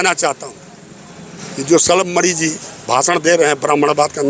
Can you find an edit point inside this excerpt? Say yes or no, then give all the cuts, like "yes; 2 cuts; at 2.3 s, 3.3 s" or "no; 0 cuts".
no; 0 cuts